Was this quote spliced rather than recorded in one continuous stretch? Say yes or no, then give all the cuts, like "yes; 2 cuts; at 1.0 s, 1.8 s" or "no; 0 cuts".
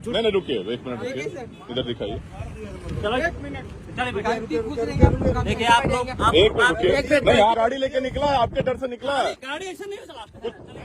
yes; 1 cut; at 7.6 s